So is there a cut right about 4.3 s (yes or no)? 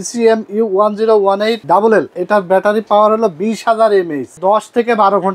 yes